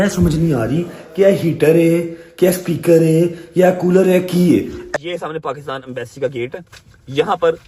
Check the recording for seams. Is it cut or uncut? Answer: cut